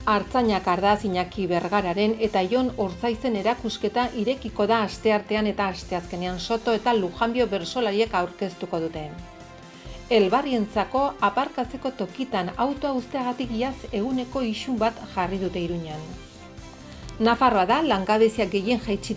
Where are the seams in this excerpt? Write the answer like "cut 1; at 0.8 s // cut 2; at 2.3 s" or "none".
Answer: none